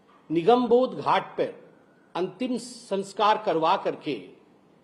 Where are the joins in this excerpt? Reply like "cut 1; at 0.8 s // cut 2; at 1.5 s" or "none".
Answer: none